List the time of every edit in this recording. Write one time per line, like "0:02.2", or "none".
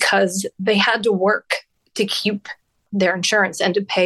0:01.8
0:02.8